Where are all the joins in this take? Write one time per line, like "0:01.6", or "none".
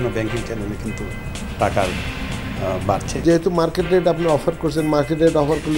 0:03.2